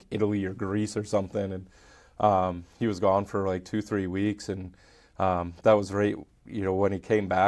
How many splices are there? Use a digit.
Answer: 0